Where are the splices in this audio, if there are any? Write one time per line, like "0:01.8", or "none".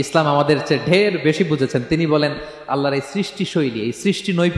none